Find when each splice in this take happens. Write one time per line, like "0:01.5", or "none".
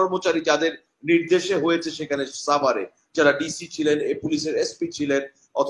none